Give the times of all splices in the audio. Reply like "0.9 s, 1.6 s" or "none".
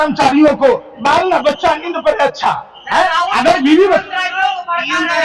none